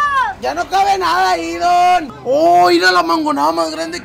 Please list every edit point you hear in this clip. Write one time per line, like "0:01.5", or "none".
0:02.1